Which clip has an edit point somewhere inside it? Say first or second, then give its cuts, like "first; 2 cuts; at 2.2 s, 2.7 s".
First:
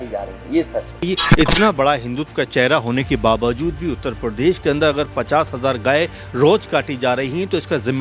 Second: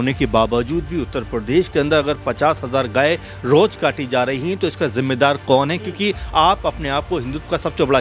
first; 1 cut; at 1.1 s